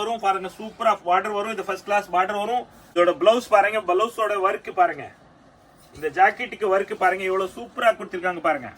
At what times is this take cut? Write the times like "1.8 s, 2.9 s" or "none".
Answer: 3.0 s